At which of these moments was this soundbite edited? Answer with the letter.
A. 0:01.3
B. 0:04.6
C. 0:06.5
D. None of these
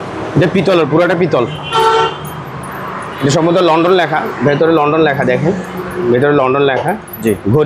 D